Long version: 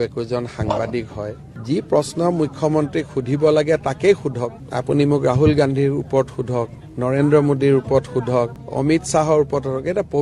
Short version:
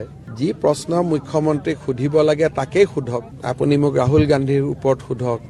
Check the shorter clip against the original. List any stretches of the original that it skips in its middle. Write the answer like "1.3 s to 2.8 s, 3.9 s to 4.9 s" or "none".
none